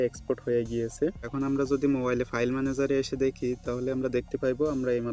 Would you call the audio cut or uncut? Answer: cut